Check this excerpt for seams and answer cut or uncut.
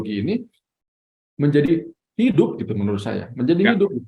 uncut